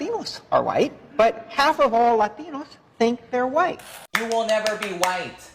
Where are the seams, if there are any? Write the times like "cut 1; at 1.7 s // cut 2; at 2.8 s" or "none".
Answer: cut 1; at 4.1 s